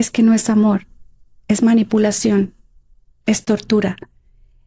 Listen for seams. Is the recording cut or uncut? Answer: uncut